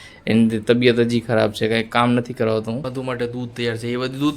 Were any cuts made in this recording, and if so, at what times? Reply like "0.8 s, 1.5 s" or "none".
2.9 s